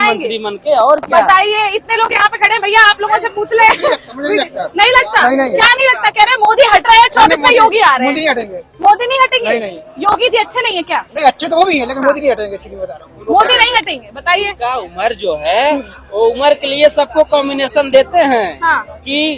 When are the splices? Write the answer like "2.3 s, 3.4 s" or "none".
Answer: none